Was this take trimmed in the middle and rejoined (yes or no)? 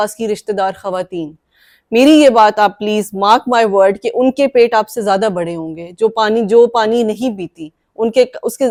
no